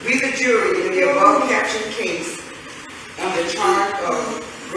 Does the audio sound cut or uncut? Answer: uncut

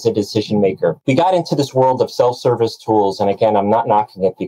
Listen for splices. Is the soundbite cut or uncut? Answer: cut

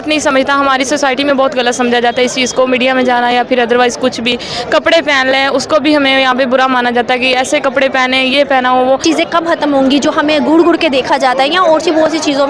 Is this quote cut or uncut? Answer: cut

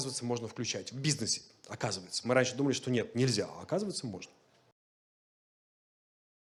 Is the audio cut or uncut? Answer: uncut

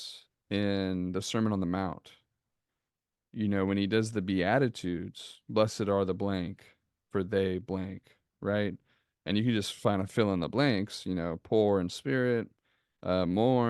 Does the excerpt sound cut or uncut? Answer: uncut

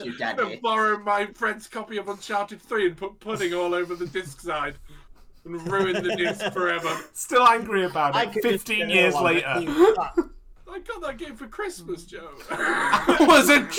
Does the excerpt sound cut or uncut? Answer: uncut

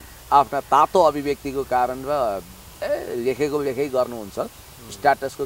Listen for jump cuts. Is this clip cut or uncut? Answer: uncut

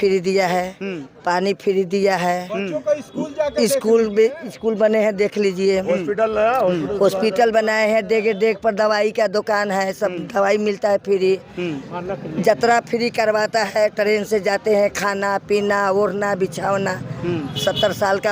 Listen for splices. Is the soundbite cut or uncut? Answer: uncut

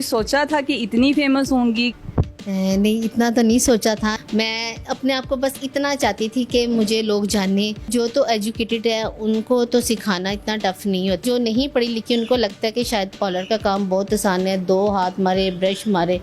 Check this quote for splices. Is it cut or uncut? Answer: cut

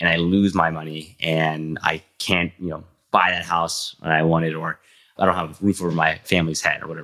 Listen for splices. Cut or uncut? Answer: cut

